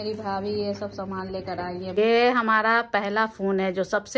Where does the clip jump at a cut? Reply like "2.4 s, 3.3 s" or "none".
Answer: 1.9 s